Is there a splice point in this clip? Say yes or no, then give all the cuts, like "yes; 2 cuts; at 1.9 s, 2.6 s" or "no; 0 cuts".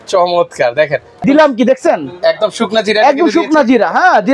yes; 1 cut; at 1.2 s